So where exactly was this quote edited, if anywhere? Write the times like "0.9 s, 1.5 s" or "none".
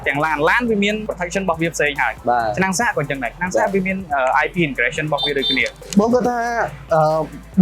5.8 s